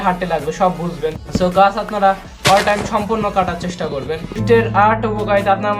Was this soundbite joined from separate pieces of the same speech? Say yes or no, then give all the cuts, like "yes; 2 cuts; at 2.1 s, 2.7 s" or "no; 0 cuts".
yes; 2 cuts; at 1.2 s, 4.3 s